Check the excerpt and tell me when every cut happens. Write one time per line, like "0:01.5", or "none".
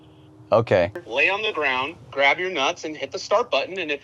0:01.0
0:02.0